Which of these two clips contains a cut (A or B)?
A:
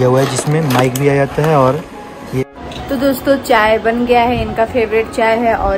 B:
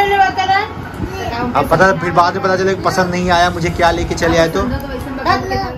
A